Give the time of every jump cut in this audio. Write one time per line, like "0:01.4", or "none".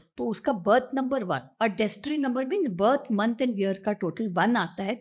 0:01.5